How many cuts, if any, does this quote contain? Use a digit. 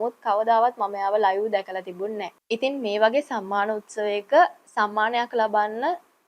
1